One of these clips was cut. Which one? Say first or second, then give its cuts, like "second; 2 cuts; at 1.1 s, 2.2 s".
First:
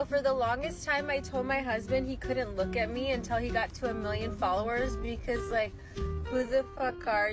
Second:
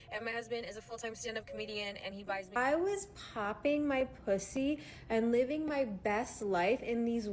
second; 1 cut; at 2.5 s